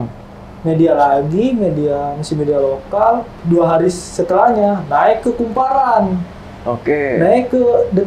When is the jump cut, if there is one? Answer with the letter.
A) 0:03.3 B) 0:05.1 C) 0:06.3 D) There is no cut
A